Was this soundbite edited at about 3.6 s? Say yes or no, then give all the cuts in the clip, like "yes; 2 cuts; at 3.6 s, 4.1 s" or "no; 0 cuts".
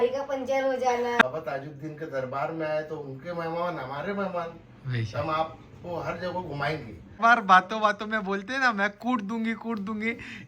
no; 2 cuts; at 1.2 s, 7.2 s